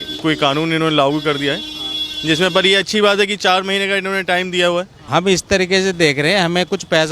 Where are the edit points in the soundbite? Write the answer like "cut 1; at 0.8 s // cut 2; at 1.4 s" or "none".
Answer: cut 1; at 5.0 s

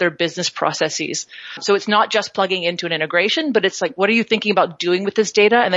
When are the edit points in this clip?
cut 1; at 1.6 s

